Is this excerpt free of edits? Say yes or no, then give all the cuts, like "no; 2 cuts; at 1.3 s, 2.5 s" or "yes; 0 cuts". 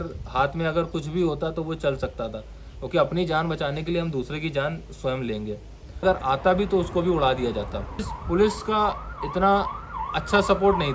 no; 2 cuts; at 6.0 s, 8.1 s